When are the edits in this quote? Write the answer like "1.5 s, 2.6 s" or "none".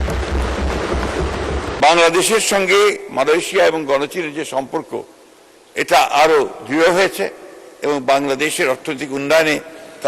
1.8 s